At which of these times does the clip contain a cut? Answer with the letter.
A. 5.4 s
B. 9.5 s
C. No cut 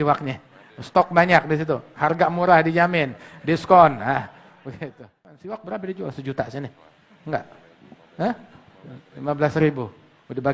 A